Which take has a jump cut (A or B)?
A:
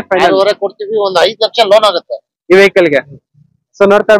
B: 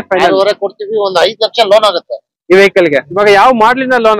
B